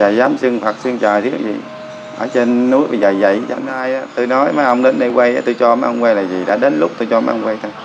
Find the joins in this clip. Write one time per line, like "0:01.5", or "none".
0:03.7